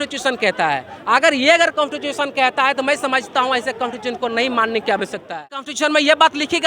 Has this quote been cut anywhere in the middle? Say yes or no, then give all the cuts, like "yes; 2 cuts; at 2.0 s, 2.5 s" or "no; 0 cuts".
yes; 1 cut; at 5.7 s